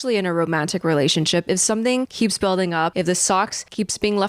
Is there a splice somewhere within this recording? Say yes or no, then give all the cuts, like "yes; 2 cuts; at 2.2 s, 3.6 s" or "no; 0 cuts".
yes; 2 cuts; at 2.1 s, 3.3 s